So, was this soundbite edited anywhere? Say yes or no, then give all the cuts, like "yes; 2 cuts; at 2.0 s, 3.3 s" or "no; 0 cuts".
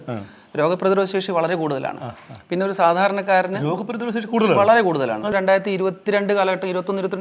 yes; 1 cut; at 5.3 s